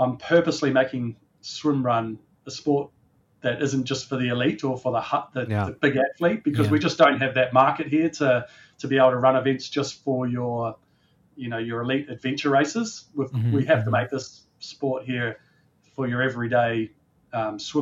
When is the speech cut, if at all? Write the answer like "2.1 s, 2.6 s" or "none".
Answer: none